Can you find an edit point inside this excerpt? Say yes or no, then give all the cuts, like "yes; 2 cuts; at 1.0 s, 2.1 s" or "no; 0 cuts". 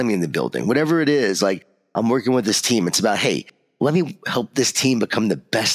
no; 0 cuts